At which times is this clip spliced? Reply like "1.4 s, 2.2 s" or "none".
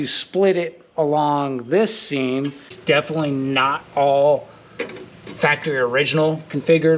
2.7 s